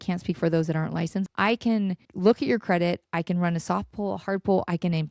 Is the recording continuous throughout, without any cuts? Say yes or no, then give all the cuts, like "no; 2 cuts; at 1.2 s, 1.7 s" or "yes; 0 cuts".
no; 3 cuts; at 1.2 s, 2.1 s, 3.1 s